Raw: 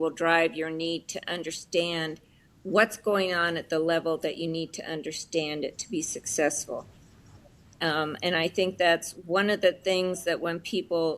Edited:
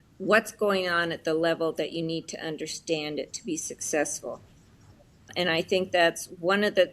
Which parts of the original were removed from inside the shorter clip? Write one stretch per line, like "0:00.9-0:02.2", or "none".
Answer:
0:07.8-0:08.2